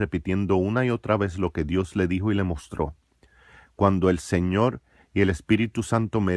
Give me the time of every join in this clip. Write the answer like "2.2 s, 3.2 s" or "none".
2.5 s